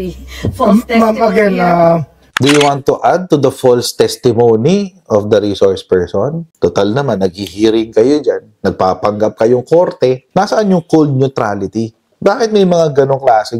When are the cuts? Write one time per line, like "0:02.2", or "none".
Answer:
0:02.2